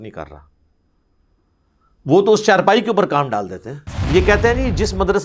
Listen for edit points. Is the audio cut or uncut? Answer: cut